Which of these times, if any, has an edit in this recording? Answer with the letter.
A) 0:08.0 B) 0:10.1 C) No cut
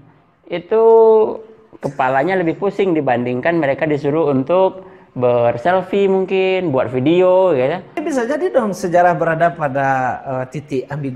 A